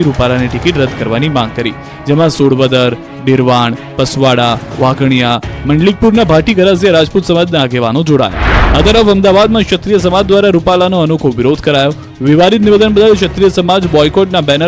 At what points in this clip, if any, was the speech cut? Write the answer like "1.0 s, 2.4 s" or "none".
9.5 s